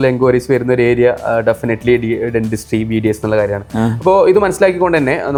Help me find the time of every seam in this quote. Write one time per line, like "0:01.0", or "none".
none